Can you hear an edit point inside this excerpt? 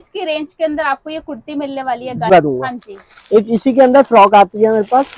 yes; 1 cut; at 2.3 s

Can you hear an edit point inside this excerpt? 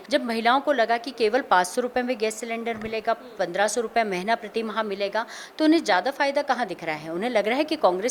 no; 0 cuts

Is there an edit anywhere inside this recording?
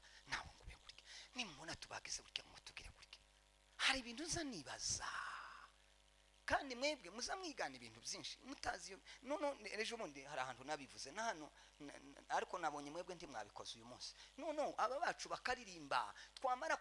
no; 0 cuts

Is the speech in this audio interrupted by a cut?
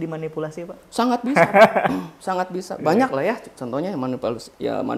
no; 0 cuts

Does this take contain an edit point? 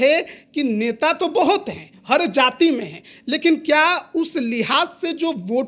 no; 0 cuts

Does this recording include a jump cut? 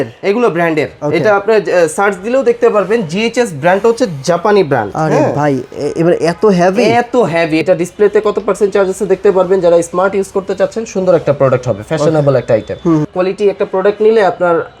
yes; 2 cuts; at 7.6 s, 13.1 s

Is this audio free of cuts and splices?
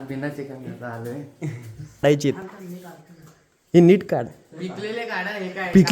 no; 1 cut; at 2.0 s

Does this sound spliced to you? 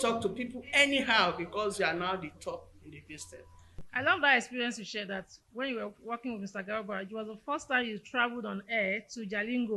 yes; 1 cut; at 3.9 s

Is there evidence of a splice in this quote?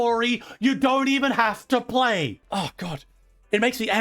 yes; 1 cut; at 2.4 s

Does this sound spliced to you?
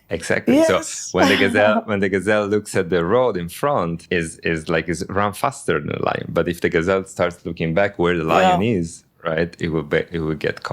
yes; 1 cut; at 4.0 s

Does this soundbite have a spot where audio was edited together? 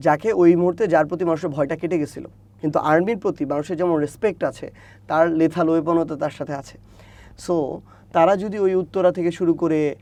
no; 0 cuts

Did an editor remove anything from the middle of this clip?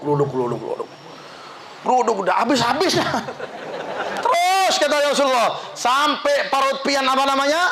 no; 0 cuts

